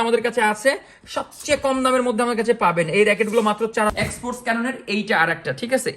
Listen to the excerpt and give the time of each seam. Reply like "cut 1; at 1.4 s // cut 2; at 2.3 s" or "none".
cut 1; at 3.9 s

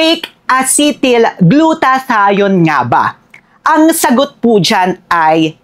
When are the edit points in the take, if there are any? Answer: none

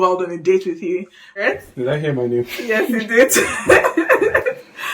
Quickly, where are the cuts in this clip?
cut 1; at 1.4 s

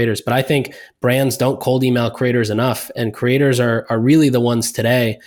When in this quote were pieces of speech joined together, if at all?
none

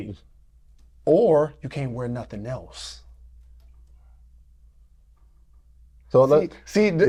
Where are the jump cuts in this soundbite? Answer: none

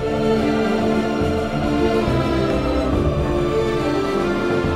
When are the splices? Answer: none

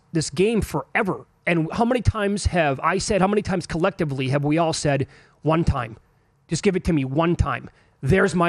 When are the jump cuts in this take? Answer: none

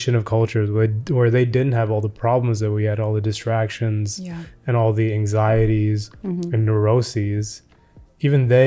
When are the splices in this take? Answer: none

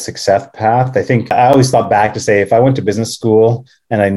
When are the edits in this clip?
cut 1; at 1.3 s

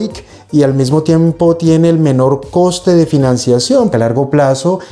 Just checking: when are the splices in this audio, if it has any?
cut 1; at 3.9 s

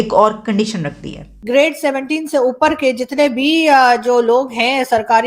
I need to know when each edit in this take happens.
cut 1; at 1.3 s

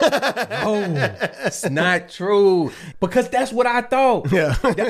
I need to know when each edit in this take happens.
cut 1; at 2.8 s

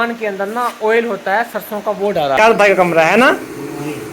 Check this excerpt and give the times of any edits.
cut 1; at 2.4 s

